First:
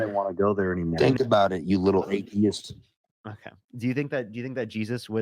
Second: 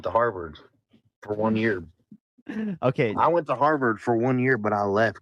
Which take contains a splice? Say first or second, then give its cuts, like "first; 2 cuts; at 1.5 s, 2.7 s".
first; 1 cut; at 0.9 s